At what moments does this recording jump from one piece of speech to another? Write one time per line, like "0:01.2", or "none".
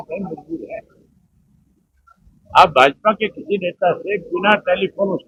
none